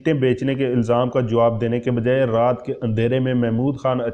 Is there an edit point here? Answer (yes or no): no